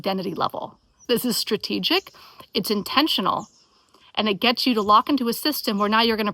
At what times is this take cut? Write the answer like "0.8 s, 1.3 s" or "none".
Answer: 1.0 s